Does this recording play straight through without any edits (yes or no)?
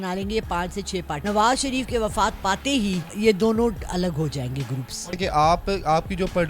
no